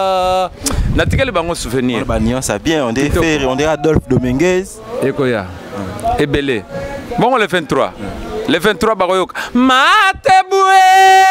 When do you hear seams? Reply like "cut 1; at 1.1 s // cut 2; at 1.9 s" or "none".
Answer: none